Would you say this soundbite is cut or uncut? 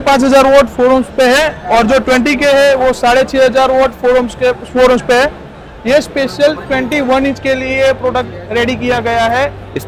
uncut